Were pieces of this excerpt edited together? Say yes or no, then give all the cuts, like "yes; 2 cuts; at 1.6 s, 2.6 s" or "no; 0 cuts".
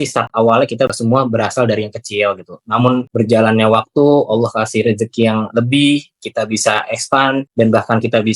yes; 3 cuts; at 0.9 s, 3.1 s, 7.5 s